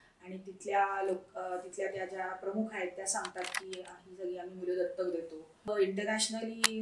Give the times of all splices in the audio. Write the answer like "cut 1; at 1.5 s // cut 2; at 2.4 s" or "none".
cut 1; at 5.7 s